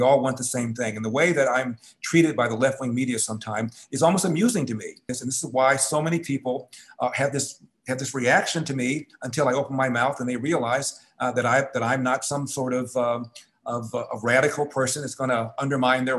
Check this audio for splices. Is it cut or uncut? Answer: cut